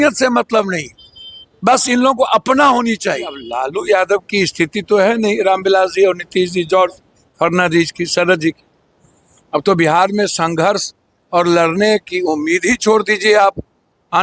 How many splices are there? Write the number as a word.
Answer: one